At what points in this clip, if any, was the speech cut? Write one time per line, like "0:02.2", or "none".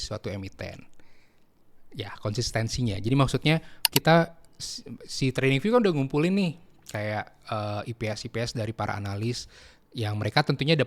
0:03.8